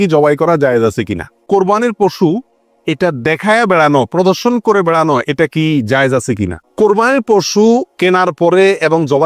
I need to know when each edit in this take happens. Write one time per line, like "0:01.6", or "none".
0:01.3
0:06.6

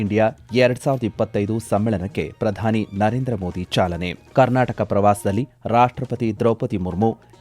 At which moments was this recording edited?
0:04.2

